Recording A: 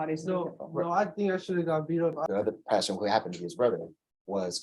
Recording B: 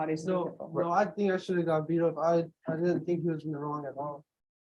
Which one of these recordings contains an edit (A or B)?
A